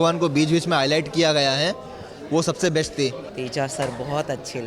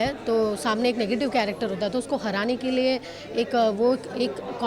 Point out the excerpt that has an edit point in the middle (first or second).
first